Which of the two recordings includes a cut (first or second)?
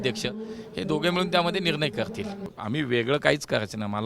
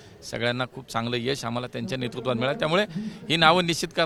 first